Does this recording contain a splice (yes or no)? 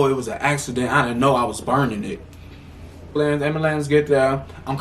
yes